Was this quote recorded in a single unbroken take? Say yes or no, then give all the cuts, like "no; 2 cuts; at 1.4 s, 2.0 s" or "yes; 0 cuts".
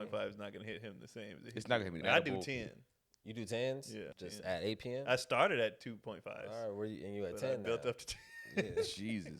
no; 2 cuts; at 2.0 s, 4.1 s